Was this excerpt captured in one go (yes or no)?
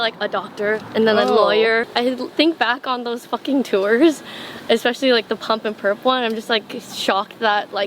no